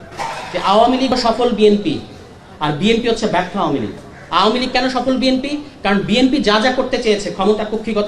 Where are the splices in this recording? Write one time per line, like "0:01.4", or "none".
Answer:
0:01.1

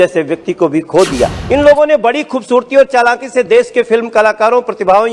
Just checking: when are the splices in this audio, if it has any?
0:01.4

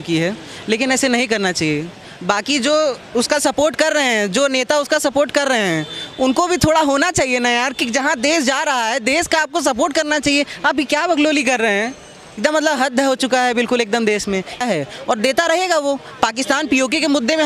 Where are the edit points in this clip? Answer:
none

